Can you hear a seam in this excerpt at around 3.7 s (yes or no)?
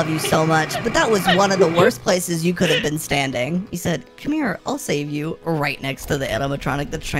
yes